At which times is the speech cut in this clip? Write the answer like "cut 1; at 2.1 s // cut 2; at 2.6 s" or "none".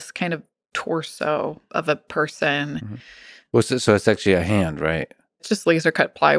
cut 1; at 1.6 s // cut 2; at 5.5 s